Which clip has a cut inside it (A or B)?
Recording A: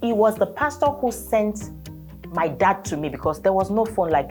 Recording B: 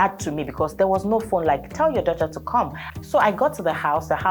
B